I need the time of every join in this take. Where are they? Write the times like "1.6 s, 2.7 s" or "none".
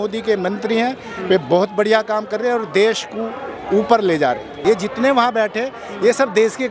4.5 s